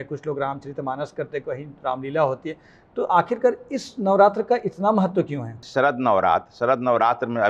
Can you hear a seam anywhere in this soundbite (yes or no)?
yes